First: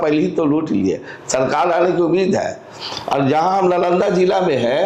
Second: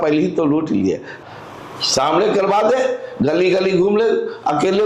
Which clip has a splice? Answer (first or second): second